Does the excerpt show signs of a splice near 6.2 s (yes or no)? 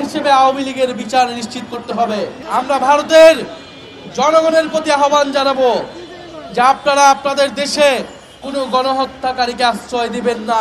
no